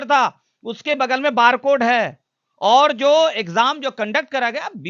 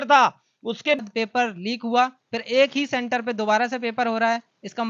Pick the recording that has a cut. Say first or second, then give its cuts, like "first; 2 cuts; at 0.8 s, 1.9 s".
second; 1 cut; at 1.0 s